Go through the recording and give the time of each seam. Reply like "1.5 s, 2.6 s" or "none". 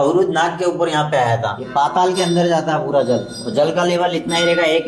1.6 s